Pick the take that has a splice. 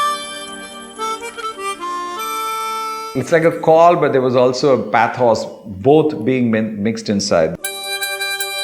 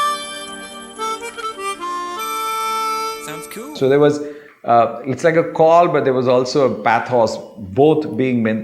first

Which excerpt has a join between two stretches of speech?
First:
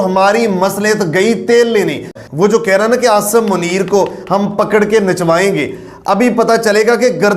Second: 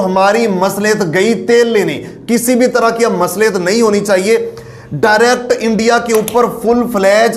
first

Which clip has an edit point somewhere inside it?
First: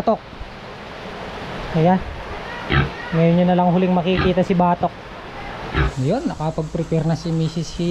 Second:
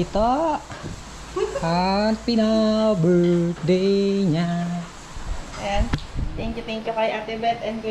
first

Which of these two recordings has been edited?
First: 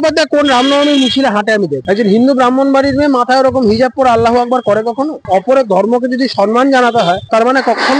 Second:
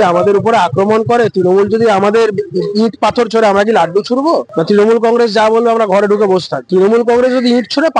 first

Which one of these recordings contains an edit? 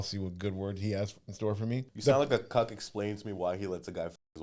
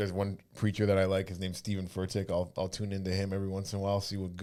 first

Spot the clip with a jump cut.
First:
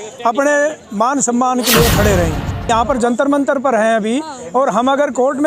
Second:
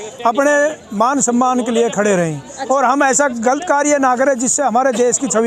first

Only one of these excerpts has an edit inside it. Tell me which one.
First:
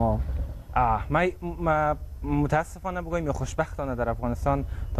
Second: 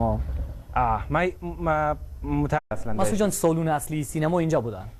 first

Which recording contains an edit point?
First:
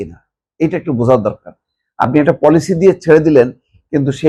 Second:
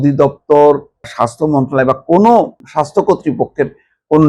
second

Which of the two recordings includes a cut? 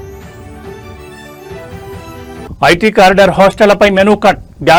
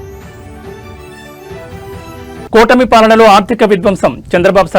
second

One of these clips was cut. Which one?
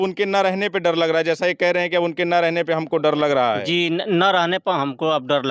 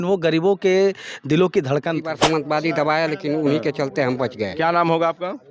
second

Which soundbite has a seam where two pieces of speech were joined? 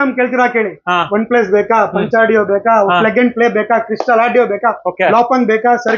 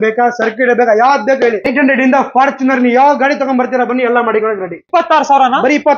second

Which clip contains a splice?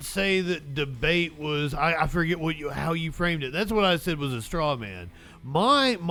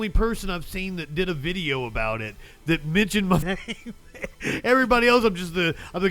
second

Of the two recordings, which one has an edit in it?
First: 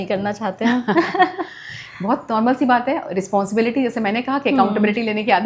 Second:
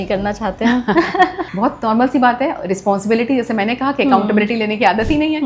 second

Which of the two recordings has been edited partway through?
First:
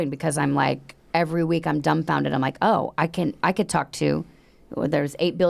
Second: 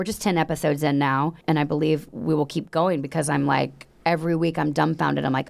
second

